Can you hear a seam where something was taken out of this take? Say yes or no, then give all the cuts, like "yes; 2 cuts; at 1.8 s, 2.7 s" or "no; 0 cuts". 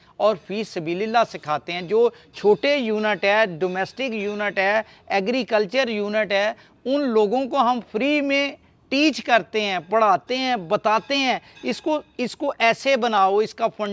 no; 0 cuts